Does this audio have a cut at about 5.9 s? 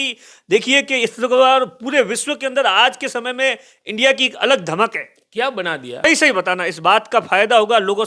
yes; 1 cut; at 5.9 s

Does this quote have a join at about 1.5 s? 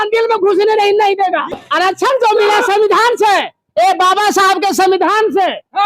yes; 1 cut; at 1.5 s

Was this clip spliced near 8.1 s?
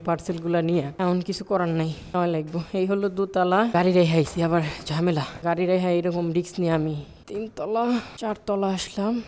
yes; 6 cuts; at 0.9 s, 2.1 s, 3.7 s, 5.3 s, 7.1 s, 8.1 s

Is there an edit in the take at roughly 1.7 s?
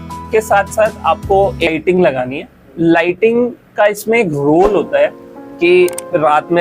yes; 1 cut; at 1.7 s

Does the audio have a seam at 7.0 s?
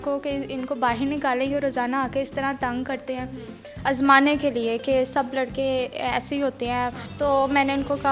yes; 2 cuts; at 3.7 s, 7.0 s

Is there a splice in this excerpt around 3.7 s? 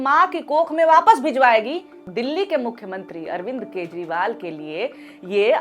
no; 1 cut; at 2.0 s

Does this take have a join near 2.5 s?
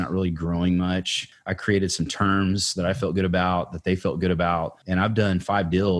no; 2 cuts; at 1.2 s, 4.8 s

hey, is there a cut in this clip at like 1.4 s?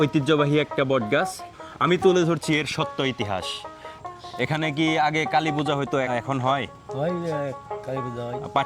yes; 3 cuts; at 1.4 s, 4.0 s, 6.1 s

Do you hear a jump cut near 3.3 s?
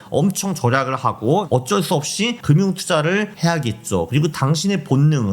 yes; 2 cuts; at 2.4 s, 3.3 s

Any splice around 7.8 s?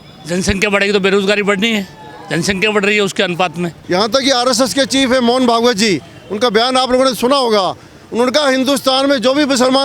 no; 1 cut; at 3.7 s

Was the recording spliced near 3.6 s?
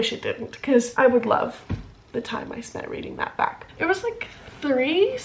yes; 1 cut; at 3.6 s

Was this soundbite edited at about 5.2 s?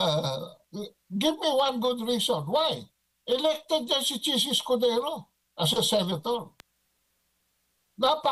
no; 0 cuts

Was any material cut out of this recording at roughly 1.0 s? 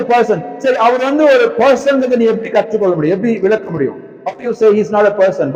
no; 0 cuts

